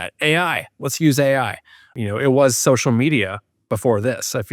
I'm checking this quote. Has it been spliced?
yes; 1 cut; at 1.9 s

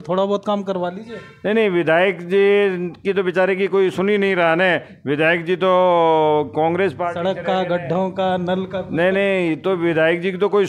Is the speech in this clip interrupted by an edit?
no; 0 cuts

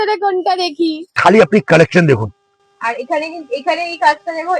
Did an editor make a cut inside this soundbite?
yes; 1 cut; at 1.1 s

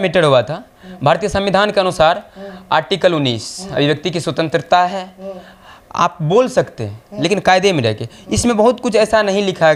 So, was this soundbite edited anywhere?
no; 0 cuts

